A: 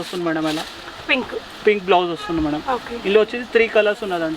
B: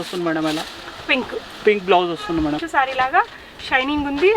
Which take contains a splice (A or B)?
B